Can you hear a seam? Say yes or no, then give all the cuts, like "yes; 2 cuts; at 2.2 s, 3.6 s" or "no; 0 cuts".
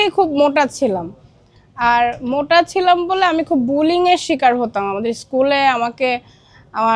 no; 0 cuts